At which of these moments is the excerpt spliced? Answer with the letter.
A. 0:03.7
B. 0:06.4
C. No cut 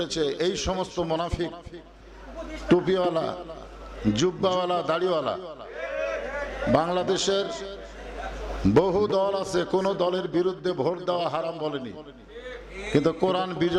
C